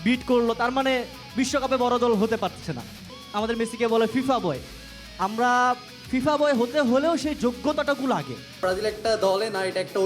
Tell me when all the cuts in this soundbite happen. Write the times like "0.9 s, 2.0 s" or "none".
3.1 s, 8.6 s